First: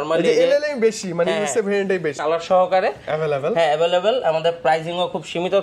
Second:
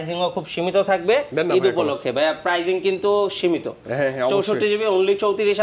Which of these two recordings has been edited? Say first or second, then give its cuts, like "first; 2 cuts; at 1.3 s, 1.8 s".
first; 1 cut; at 2.2 s